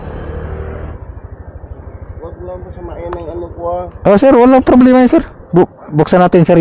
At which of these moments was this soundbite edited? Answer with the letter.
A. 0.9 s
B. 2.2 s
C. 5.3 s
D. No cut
A